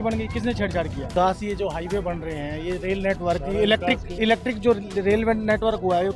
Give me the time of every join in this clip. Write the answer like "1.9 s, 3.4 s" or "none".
1.1 s